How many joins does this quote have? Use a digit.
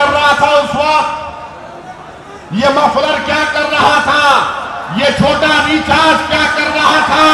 0